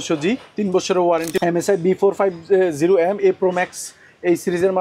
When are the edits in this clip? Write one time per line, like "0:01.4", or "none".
0:01.3